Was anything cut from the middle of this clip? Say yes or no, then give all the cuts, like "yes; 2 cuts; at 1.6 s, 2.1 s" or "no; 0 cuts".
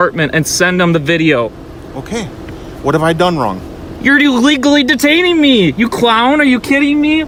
no; 0 cuts